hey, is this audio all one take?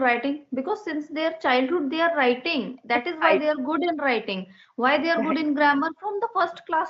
yes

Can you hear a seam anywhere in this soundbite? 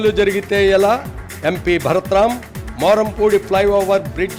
no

